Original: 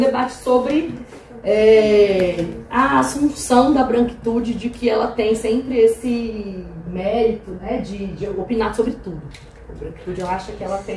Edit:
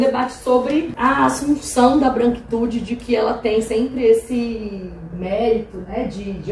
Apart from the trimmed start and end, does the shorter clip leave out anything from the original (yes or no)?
yes